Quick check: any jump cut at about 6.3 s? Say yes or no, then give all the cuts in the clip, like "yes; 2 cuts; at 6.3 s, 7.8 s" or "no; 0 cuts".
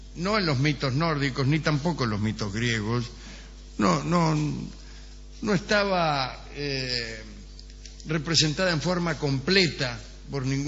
yes; 1 cut; at 6.3 s